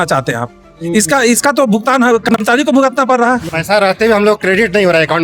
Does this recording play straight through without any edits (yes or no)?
no